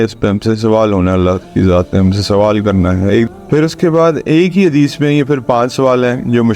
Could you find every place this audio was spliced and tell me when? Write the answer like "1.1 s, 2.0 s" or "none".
3.3 s